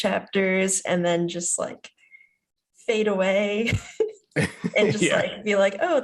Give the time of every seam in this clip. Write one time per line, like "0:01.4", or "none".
none